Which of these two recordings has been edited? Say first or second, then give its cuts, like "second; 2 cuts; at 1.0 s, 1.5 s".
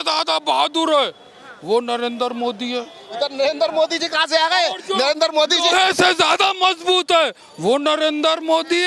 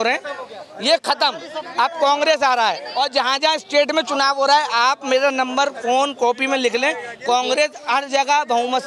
second; 1 cut; at 2.9 s